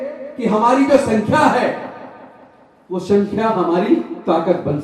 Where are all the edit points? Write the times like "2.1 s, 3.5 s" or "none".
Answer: none